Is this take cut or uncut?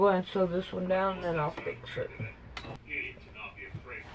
cut